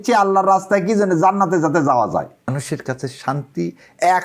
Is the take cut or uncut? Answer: cut